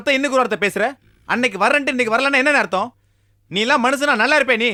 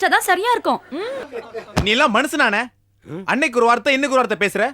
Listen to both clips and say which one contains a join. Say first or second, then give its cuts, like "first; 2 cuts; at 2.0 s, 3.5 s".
second; 1 cut; at 1.3 s